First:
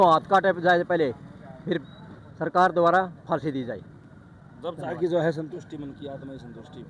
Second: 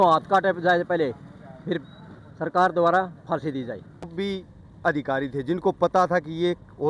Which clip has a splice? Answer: second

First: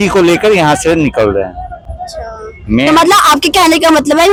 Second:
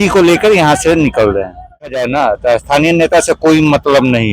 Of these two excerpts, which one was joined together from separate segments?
second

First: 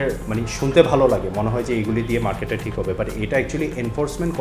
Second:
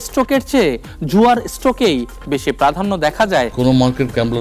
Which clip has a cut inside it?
second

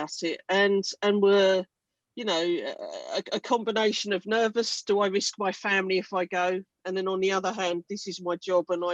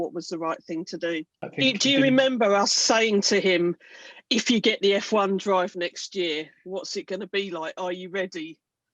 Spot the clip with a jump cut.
second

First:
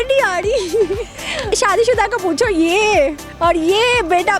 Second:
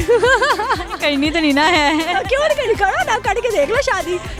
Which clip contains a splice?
first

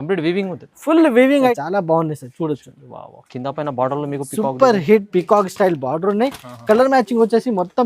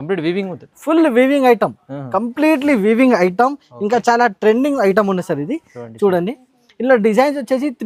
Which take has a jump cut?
first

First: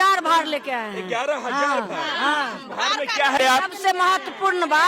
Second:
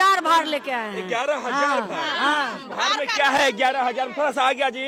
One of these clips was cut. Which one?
first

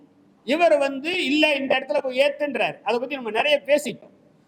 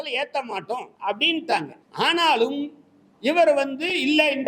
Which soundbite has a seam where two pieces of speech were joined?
second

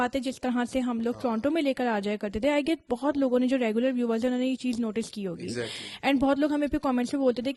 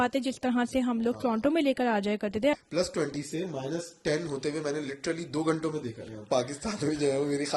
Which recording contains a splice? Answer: second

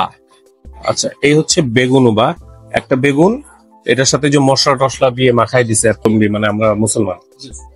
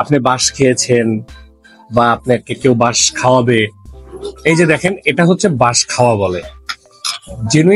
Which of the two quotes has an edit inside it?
first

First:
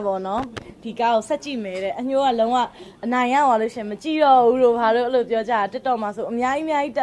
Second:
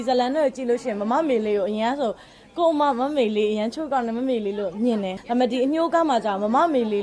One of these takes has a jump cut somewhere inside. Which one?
second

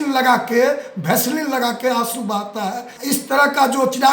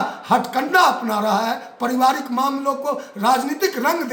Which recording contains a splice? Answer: first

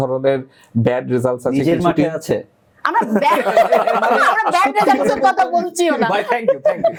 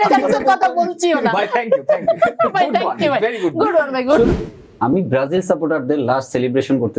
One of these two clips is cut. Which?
second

